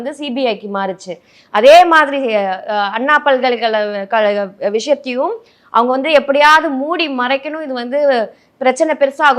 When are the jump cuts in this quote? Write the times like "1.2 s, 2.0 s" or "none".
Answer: none